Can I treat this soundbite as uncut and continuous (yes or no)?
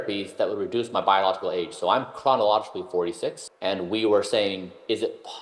no